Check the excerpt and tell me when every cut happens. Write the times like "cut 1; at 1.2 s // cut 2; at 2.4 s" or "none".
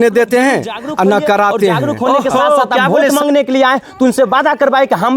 cut 1; at 3.1 s